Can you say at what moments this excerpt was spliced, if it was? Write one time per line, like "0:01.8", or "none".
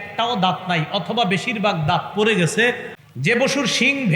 0:02.9